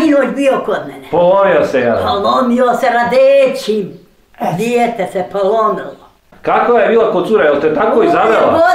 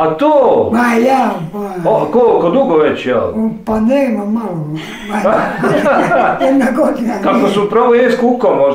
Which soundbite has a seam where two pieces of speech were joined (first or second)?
first